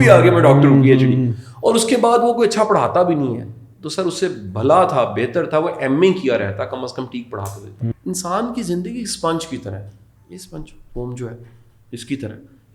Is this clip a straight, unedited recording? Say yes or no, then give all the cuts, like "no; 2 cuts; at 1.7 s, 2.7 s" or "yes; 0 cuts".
no; 1 cut; at 7.8 s